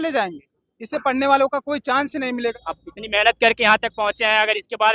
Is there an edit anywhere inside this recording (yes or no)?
yes